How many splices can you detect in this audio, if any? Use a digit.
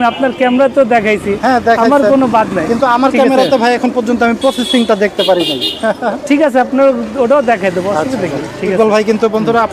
0